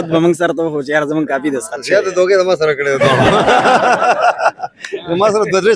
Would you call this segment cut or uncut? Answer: uncut